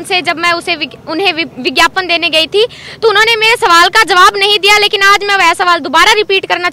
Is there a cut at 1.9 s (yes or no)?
no